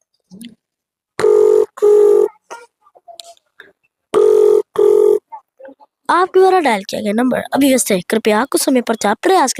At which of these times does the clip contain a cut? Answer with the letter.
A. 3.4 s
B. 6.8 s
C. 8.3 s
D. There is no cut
D